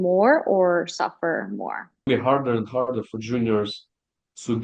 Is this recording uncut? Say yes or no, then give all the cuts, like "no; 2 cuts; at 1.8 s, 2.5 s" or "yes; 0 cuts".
no; 1 cut; at 2.1 s